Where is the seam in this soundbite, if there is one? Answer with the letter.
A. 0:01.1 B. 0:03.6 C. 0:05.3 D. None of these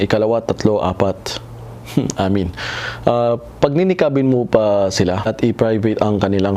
C